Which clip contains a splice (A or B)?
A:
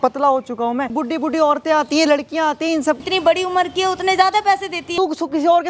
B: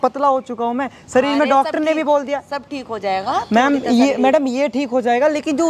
A